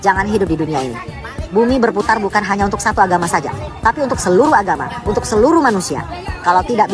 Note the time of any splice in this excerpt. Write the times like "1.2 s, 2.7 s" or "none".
none

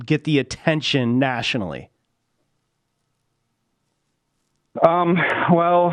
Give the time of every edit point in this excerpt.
none

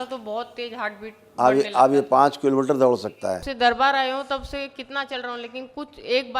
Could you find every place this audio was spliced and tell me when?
3.5 s

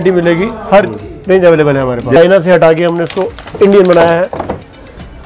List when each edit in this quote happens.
2.2 s

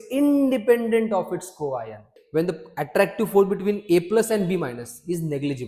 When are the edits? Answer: 2.1 s

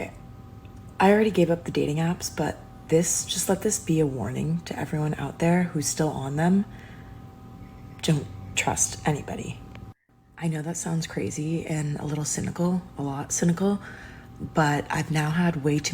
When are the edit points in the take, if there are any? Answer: 5.1 s

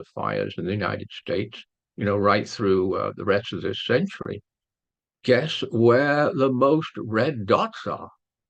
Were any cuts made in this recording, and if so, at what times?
none

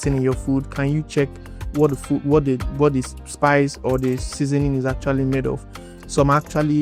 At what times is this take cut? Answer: none

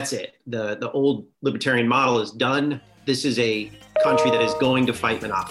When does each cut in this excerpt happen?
1.3 s, 2.9 s

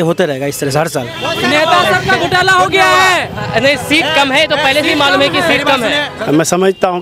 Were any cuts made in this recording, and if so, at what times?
1.3 s, 6.1 s

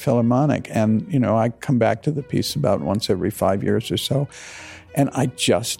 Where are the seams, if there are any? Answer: none

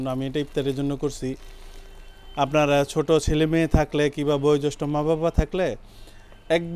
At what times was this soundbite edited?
none

